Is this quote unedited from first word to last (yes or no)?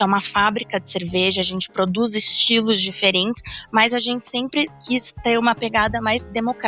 yes